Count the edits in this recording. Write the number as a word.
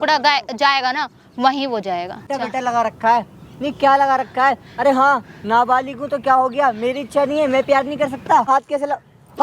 two